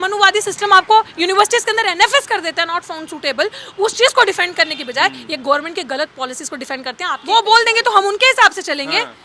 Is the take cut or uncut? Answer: cut